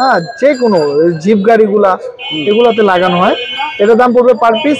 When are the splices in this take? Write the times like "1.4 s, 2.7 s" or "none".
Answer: none

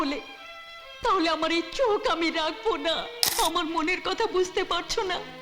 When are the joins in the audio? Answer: 3.2 s

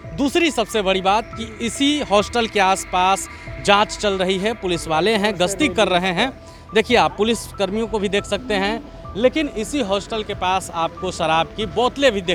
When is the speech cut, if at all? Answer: none

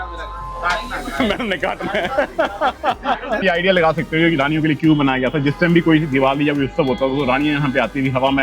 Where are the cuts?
3.4 s

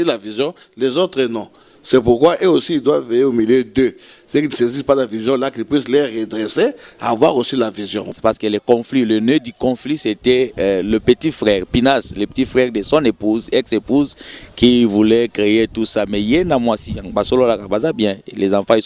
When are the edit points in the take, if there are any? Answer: 8.1 s

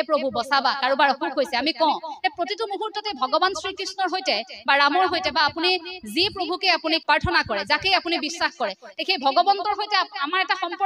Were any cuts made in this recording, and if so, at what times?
7.0 s

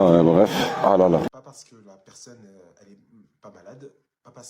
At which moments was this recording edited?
1.3 s

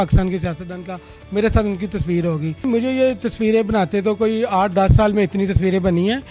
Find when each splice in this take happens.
2.6 s

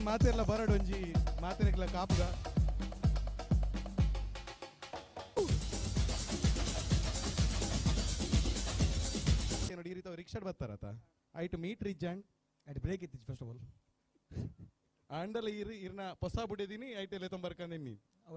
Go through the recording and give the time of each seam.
5.4 s, 9.6 s

